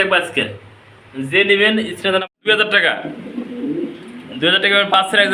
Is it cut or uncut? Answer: cut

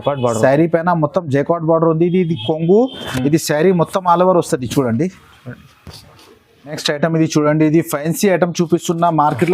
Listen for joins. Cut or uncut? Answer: cut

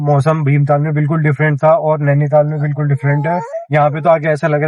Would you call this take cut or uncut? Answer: cut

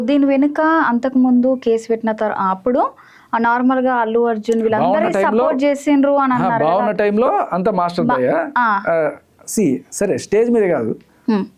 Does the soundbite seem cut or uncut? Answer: uncut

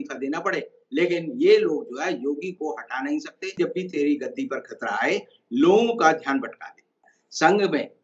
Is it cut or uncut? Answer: cut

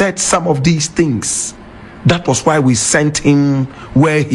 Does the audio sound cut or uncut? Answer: uncut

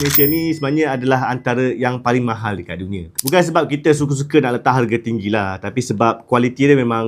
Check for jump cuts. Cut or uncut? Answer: uncut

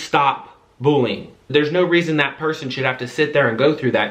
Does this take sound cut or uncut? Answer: cut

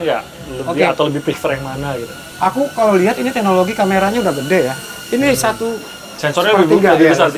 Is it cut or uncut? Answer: uncut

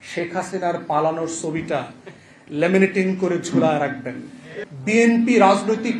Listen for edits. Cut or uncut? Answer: cut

